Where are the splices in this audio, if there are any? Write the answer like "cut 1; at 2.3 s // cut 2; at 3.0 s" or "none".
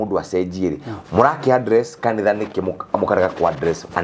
none